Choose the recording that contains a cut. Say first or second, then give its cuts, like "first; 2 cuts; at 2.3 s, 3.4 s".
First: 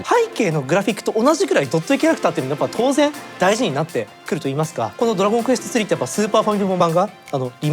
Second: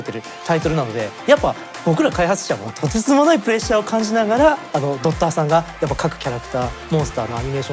first; 2 cuts; at 4.9 s, 6.8 s